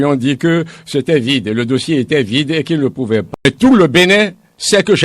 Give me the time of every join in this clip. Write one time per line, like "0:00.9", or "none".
0:03.3

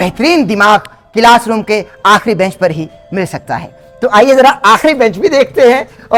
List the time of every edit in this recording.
none

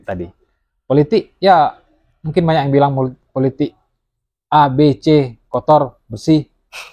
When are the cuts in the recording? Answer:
none

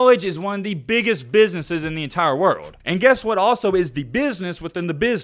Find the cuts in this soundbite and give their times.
none

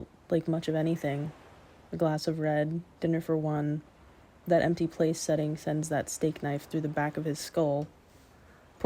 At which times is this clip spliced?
0:07.4

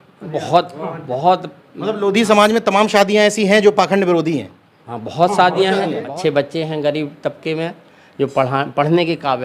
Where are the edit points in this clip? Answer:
0:06.0

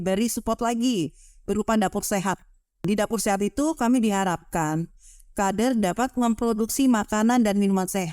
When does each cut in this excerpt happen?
0:02.8

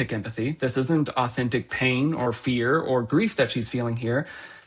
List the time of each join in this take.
none

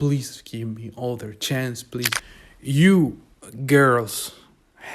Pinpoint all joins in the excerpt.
0:02.2

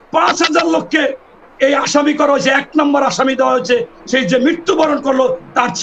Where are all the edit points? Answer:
none

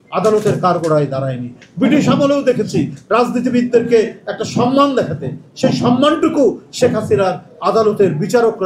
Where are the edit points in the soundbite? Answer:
none

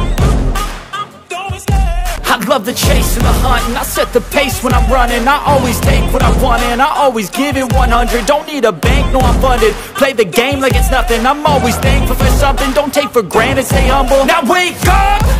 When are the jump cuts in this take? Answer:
0:02.2

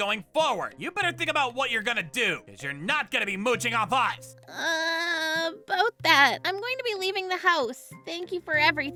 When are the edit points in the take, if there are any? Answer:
none

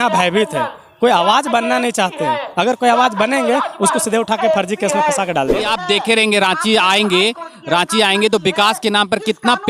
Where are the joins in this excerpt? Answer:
0:05.6

